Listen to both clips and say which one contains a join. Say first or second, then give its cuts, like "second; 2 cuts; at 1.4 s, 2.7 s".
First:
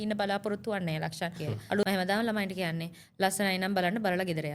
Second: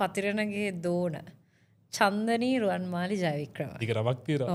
first; 1 cut; at 1.8 s